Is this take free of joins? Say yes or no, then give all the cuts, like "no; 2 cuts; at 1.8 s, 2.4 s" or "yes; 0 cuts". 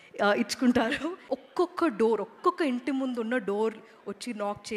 no; 1 cut; at 1.2 s